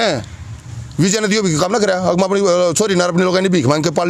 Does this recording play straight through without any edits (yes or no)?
yes